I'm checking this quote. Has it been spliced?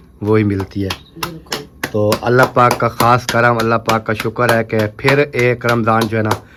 no; 0 cuts

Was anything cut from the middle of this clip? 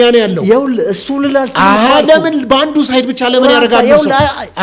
no; 0 cuts

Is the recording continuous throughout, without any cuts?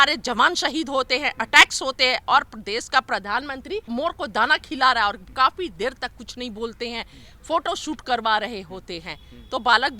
no; 1 cut; at 3.9 s

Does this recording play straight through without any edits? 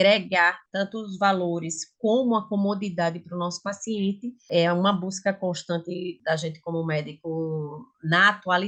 yes; 0 cuts

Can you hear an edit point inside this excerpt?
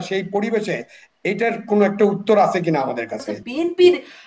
yes; 1 cut; at 3.4 s

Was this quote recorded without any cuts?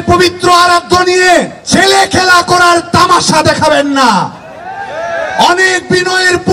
no; 1 cut; at 1.6 s

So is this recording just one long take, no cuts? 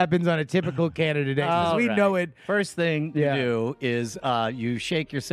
no; 1 cut; at 2.4 s

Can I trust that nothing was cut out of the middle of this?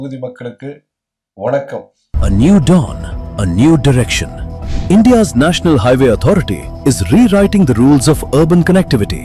yes; 0 cuts

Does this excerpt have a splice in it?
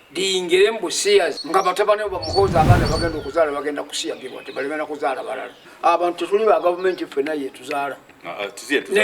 yes; 2 cuts; at 1.4 s, 5.7 s

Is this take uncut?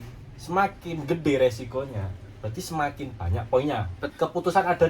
no; 1 cut; at 4.0 s

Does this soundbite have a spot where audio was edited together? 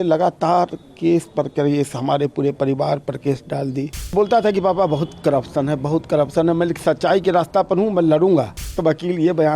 yes; 2 cuts; at 4.1 s, 8.7 s

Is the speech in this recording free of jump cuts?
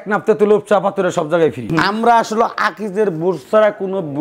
no; 1 cut; at 1.6 s

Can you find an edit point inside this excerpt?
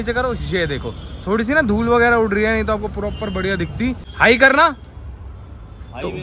yes; 1 cut; at 4.1 s

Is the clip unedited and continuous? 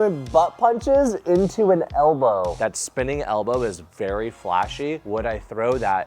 no; 1 cut; at 2.5 s

